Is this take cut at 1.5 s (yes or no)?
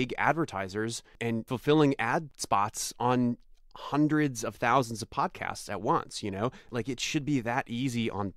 yes